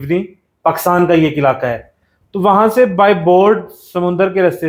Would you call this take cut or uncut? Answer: uncut